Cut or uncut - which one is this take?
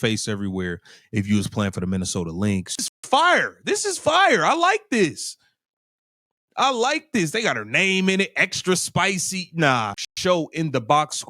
cut